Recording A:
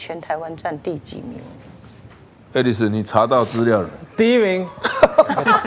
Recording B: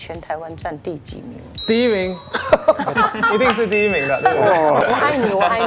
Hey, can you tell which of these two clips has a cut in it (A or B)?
B